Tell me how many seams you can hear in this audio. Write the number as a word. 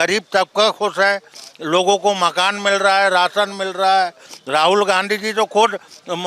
one